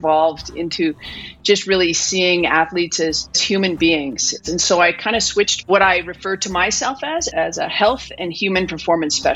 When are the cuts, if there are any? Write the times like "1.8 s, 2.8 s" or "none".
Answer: 3.4 s, 4.4 s, 5.7 s, 7.3 s